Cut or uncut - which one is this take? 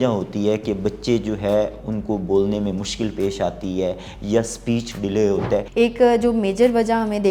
cut